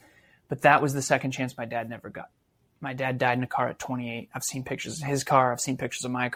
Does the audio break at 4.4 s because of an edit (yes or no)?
no